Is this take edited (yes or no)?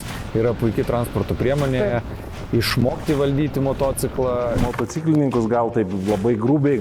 yes